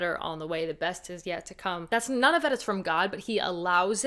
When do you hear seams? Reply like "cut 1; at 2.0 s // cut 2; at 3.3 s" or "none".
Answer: cut 1; at 1.8 s